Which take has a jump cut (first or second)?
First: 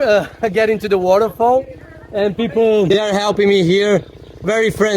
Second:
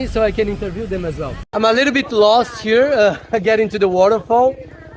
second